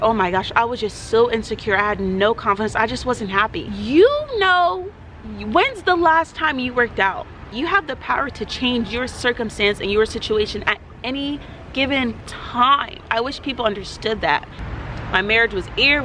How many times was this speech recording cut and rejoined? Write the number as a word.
three